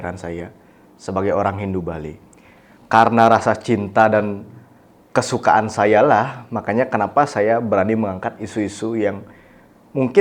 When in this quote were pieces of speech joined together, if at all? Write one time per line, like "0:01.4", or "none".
none